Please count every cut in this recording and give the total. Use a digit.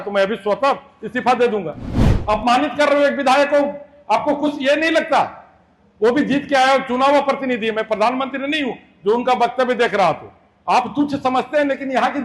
1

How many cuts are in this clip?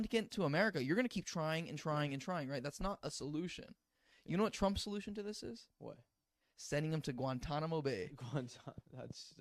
0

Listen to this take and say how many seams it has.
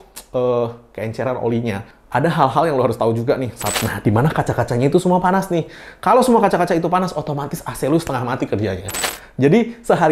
2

